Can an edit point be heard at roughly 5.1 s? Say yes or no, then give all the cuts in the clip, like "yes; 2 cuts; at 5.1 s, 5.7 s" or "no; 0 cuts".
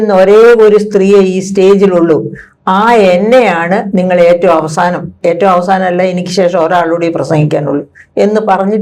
no; 0 cuts